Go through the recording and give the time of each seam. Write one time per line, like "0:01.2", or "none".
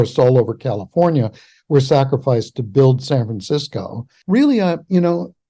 0:04.1